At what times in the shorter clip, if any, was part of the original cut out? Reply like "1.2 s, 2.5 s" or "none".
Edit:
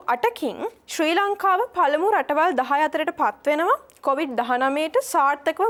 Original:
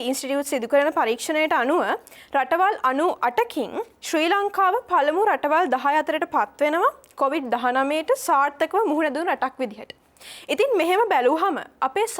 none

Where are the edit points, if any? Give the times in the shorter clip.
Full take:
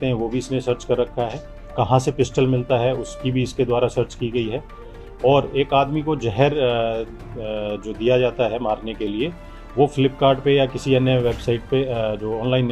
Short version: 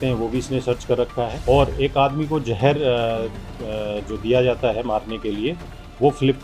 1.4 s

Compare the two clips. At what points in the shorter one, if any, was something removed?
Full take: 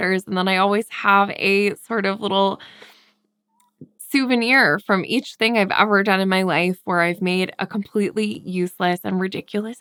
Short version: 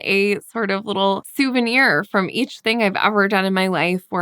1.3 s

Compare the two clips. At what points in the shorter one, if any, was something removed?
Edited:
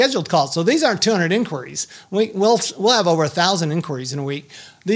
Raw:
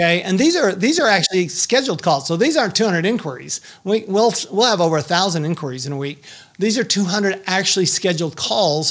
none

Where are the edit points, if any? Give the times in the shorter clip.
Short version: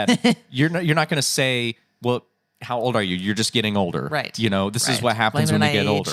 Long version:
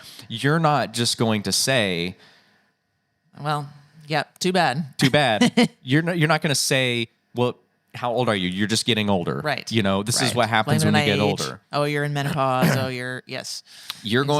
none

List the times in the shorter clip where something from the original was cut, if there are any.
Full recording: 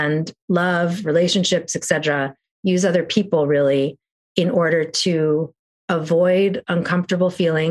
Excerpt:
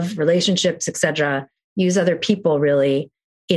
none

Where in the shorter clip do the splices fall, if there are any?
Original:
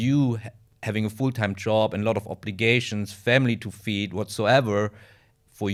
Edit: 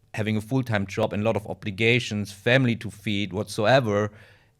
1.0 s

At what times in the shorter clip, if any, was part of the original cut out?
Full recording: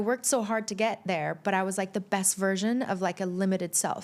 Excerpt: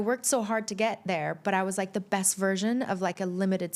none

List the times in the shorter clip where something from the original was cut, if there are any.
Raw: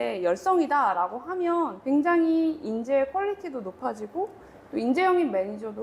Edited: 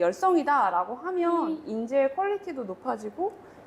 1.5 s

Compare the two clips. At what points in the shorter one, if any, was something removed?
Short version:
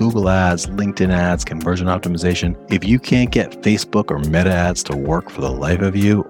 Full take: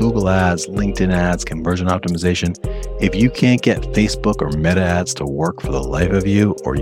2.6 s

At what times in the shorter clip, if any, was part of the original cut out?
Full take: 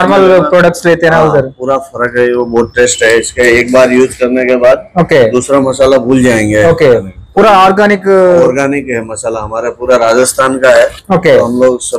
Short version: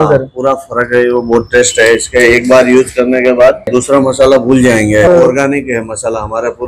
3.7 s, 5.1 s

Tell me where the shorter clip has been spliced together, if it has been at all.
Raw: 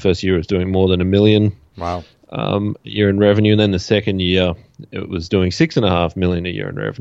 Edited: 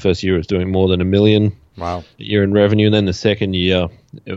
2.1 s

